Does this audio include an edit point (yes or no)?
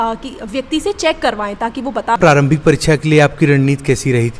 yes